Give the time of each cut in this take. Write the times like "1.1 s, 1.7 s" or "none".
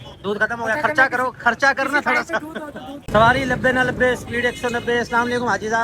3.0 s

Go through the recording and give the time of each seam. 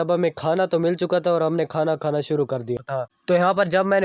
2.9 s

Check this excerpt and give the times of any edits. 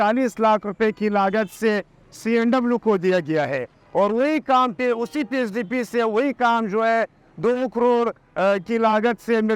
none

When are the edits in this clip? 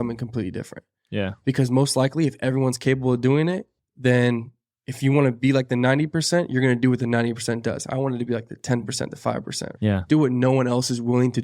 9.7 s

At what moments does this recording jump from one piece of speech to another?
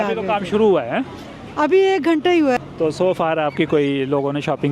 2.6 s

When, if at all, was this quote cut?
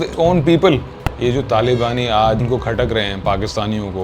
1.1 s

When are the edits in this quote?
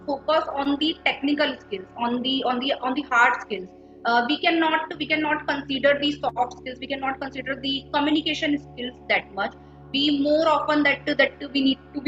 none

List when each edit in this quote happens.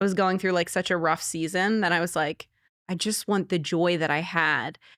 none

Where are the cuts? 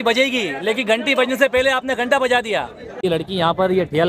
3.0 s

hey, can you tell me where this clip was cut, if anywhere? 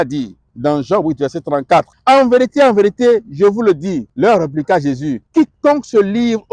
1.9 s, 4.1 s, 5.1 s

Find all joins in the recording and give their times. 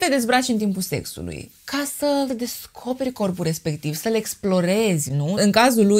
none

